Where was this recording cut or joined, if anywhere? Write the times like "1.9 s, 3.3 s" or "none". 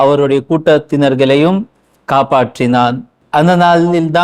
3.2 s